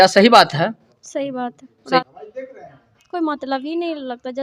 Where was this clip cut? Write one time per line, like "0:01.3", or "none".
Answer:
0:02.0